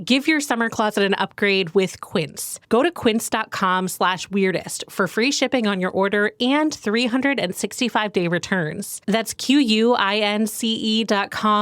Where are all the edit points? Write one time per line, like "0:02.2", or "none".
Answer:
none